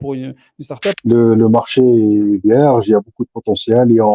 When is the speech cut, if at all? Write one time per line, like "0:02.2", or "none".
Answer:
0:01.0